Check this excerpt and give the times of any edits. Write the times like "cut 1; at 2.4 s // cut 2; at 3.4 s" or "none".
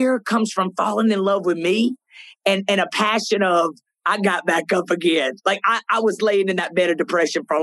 none